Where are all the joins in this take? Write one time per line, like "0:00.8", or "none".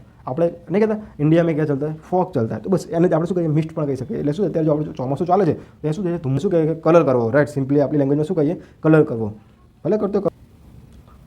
0:06.4
0:10.3